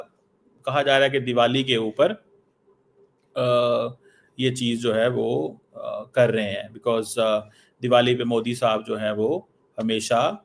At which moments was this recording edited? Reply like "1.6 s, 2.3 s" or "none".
none